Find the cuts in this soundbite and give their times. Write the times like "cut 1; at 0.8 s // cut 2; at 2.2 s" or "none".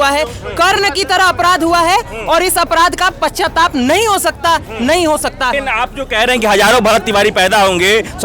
cut 1; at 5.6 s